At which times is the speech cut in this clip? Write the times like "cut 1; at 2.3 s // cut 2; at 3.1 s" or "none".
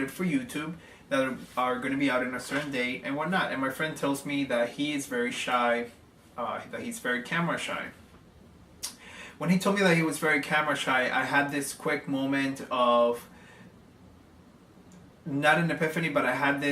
cut 1; at 3.6 s